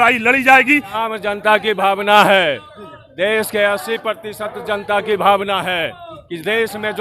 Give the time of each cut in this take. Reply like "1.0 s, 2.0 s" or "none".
1.0 s